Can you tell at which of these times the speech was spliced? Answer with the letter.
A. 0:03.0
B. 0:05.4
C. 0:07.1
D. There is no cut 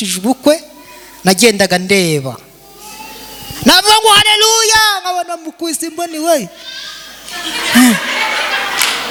D